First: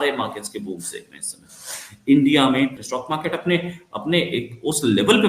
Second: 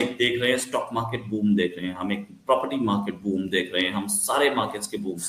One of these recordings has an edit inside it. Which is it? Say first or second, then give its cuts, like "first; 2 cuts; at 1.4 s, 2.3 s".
first; 1 cut; at 2.9 s